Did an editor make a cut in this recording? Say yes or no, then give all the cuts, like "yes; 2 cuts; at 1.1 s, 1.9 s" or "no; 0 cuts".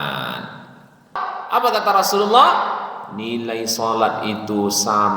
yes; 1 cut; at 1.3 s